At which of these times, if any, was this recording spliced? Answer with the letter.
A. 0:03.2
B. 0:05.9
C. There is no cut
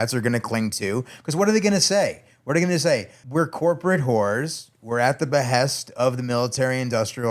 A